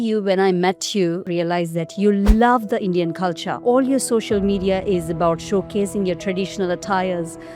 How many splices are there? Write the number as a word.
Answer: two